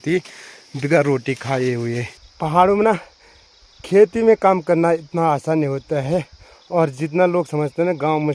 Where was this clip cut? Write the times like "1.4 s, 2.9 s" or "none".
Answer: 2.2 s